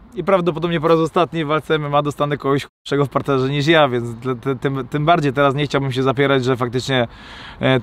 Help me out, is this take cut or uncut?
uncut